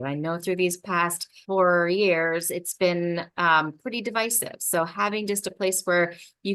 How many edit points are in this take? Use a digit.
1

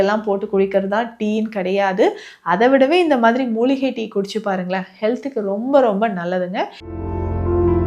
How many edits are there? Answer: 1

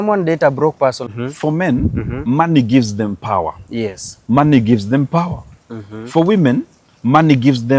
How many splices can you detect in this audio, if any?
1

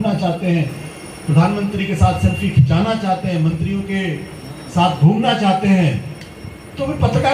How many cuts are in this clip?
0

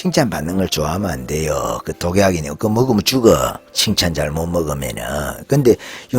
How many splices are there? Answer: 1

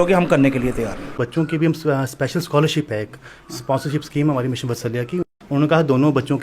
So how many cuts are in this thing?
2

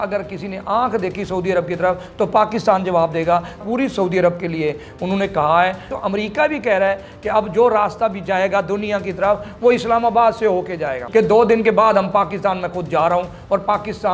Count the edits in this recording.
3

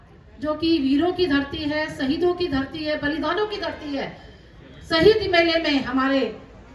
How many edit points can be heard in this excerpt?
0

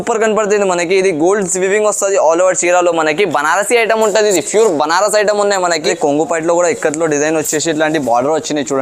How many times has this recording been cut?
1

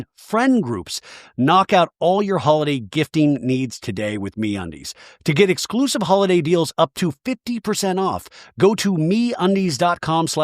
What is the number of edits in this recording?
1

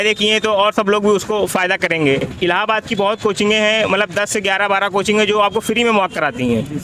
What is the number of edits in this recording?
1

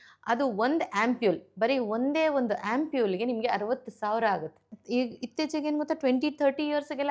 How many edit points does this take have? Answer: 1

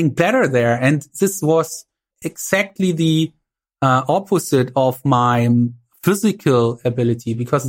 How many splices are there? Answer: 1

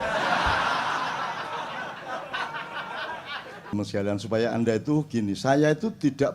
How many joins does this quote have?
1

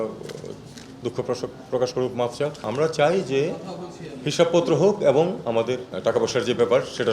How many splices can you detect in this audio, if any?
2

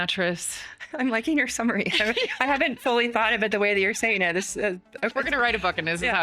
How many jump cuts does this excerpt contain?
1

